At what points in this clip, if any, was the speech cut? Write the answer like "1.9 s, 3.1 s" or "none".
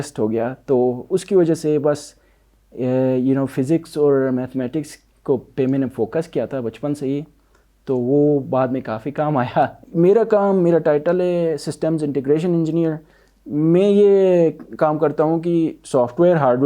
9.8 s